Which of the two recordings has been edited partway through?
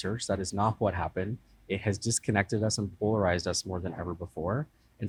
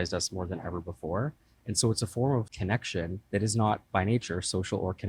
second; 1 cut; at 3.2 s

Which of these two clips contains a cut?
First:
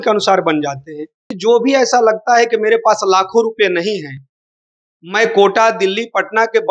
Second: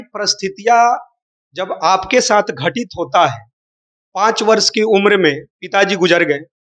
first; 1 cut; at 1.3 s

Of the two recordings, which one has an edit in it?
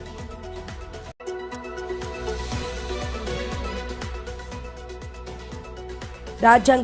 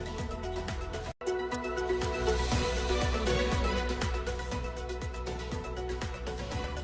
first; 2 cuts; at 1.2 s, 4.7 s

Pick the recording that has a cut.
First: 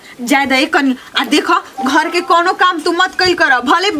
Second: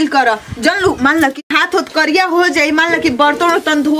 second; 1 cut; at 1.3 s

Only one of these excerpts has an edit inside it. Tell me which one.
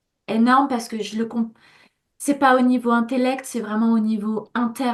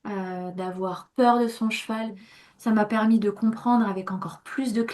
second; 1 cut; at 2.0 s

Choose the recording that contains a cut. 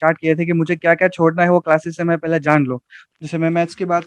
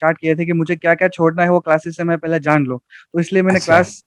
first; 1 cut; at 3.0 s

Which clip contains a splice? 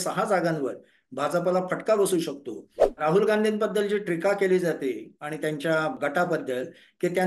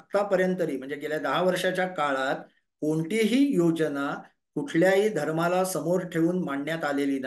first; 2 cuts; at 3.0 s, 6.0 s

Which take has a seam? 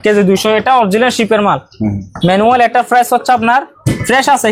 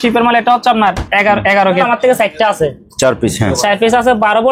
second; 1 cut; at 1.8 s

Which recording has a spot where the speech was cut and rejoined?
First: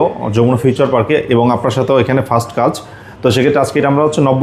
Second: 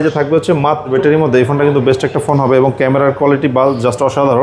second; 1 cut; at 0.9 s

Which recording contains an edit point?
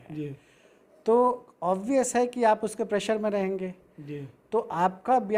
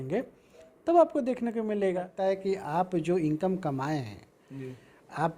second; 1 cut; at 2.1 s

